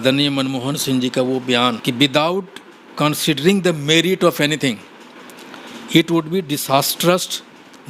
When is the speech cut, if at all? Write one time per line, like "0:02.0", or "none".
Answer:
0:01.8